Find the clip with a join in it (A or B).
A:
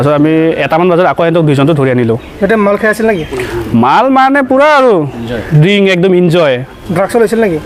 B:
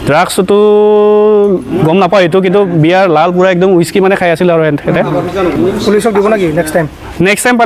B